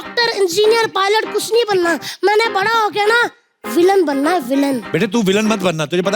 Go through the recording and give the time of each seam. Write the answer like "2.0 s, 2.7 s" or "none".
4.8 s